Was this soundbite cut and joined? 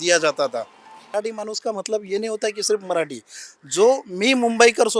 yes; 1 cut; at 1.1 s

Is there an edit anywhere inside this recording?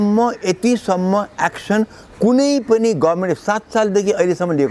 no; 0 cuts

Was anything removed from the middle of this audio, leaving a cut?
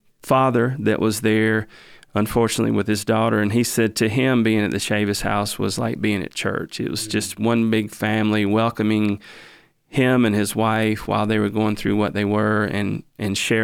no; 0 cuts

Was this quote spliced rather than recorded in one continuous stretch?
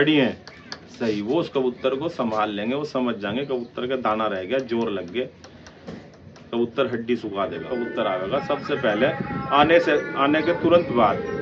yes; 1 cut; at 7.7 s

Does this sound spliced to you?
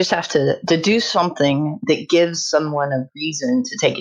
no; 0 cuts

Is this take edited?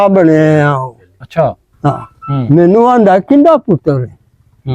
yes; 1 cut; at 2.4 s

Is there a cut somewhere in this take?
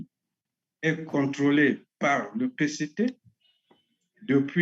no; 0 cuts

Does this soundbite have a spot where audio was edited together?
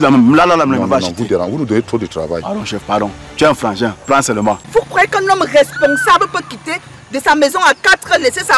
yes; 1 cut; at 4.6 s

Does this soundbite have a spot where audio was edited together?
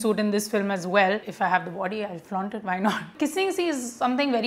yes; 2 cuts; at 1.3 s, 3.1 s

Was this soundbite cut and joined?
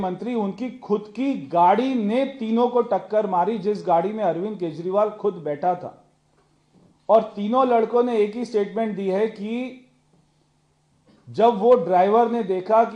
no; 0 cuts

